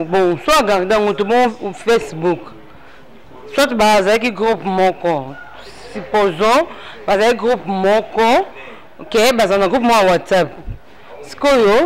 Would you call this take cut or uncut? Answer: uncut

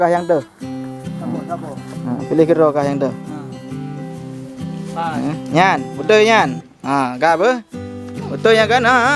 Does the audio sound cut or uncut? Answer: uncut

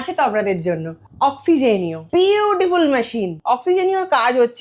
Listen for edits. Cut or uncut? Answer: cut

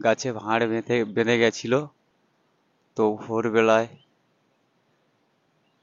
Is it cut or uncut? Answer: uncut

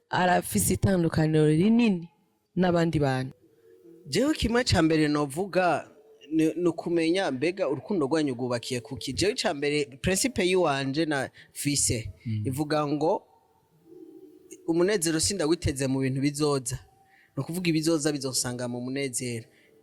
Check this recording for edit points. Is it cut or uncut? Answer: cut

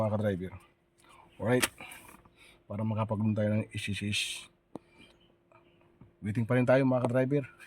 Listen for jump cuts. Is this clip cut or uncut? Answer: uncut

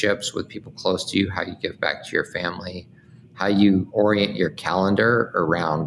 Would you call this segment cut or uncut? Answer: cut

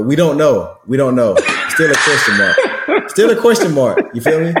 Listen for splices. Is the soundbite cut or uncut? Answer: uncut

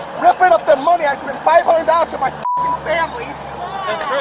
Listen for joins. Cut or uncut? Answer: uncut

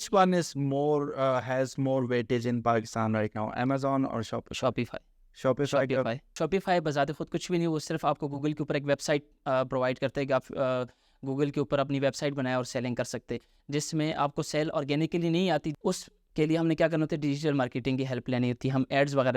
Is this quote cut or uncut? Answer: cut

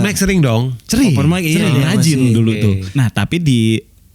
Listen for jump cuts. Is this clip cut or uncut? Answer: cut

